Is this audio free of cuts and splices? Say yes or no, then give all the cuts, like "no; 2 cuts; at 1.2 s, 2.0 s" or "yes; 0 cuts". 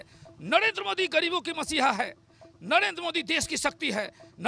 yes; 0 cuts